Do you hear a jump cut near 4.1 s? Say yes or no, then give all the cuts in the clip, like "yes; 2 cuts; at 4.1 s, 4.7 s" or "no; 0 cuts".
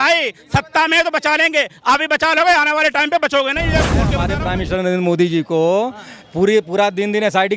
yes; 1 cut; at 4.1 s